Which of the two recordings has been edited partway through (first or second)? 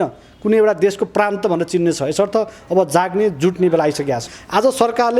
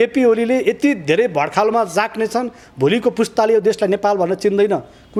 first